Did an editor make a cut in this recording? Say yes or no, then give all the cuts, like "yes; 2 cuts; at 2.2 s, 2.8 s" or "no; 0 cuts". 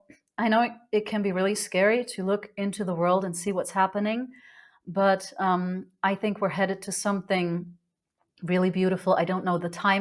no; 0 cuts